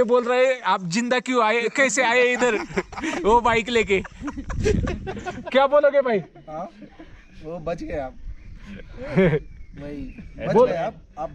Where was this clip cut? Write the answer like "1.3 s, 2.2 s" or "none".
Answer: none